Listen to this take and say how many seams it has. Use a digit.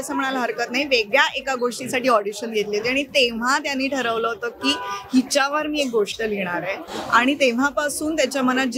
0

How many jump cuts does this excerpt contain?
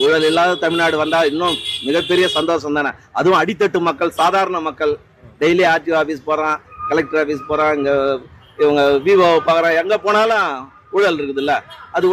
0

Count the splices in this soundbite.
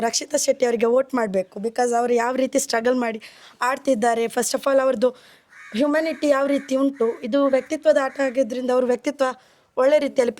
0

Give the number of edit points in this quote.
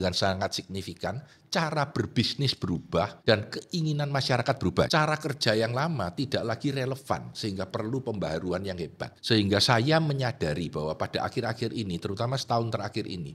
3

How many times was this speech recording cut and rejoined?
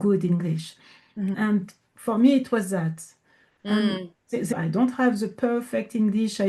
2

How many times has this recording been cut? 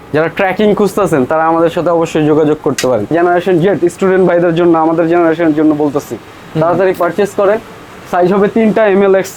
1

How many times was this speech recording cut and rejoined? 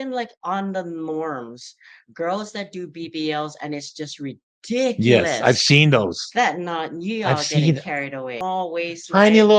1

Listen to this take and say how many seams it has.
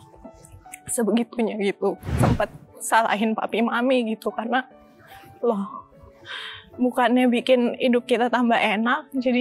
1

